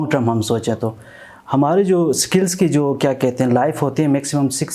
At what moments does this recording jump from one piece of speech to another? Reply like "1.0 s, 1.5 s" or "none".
none